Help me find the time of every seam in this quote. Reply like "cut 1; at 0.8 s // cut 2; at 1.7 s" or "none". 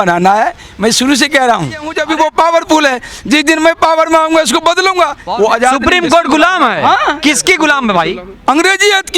cut 1; at 1.9 s // cut 2; at 5.2 s